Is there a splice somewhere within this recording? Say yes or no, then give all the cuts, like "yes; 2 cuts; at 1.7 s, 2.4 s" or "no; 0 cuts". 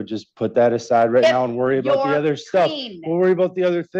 no; 0 cuts